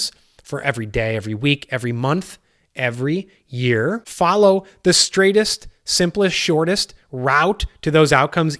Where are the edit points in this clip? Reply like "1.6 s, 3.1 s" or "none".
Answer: 4.1 s